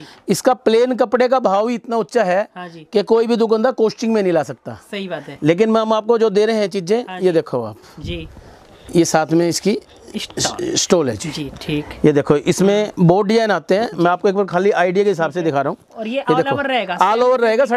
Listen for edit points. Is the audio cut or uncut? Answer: uncut